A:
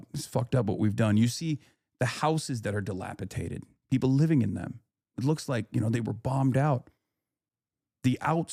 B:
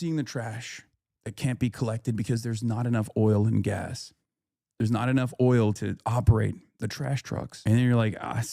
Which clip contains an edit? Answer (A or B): B